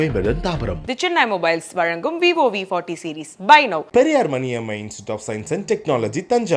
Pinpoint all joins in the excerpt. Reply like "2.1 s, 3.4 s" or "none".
none